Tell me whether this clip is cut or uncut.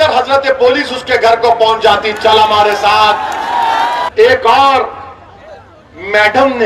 cut